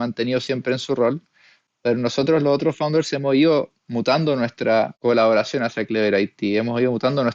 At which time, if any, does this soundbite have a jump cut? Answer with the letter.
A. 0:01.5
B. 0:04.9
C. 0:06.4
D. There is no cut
B